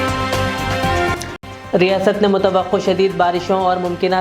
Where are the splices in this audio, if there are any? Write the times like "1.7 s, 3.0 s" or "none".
1.2 s